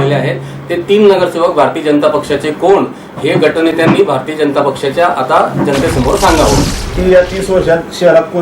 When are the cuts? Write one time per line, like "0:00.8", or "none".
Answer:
0:06.8

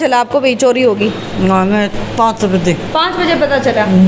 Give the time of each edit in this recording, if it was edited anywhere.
none

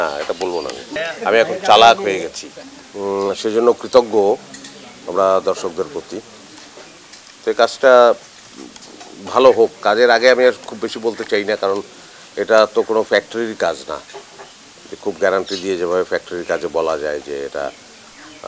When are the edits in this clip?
0:01.0
0:02.5

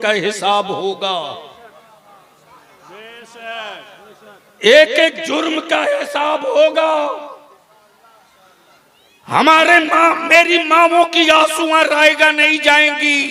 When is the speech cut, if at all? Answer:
none

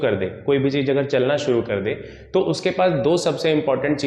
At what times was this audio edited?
none

